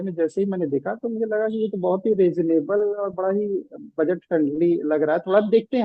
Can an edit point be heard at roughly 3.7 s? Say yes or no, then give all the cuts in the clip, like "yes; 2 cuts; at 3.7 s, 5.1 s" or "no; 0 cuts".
no; 0 cuts